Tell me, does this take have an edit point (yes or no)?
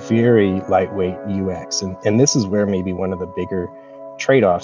no